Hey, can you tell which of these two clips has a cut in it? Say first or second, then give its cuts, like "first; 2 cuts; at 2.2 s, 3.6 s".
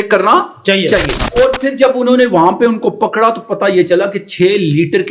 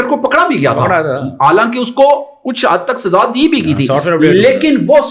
first; 1 cut; at 1.2 s